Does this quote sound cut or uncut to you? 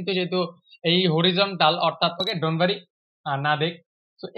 cut